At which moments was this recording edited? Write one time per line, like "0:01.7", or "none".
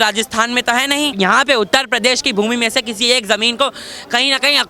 0:01.1